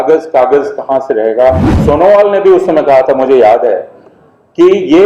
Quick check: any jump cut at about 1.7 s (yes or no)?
yes